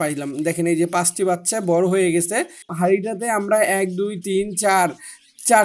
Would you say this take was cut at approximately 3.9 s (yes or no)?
no